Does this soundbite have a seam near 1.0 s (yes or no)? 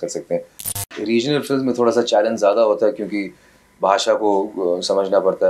yes